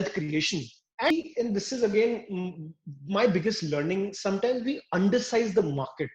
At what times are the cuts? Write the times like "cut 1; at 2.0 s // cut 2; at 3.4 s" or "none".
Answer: cut 1; at 1.1 s